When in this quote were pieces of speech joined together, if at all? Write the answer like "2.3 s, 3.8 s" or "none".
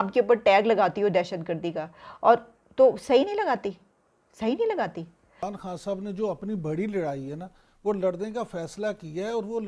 5.2 s